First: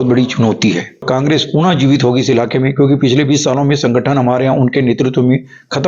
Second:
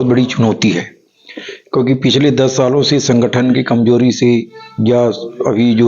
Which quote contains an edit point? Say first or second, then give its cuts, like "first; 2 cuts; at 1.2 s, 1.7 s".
first; 1 cut; at 1.0 s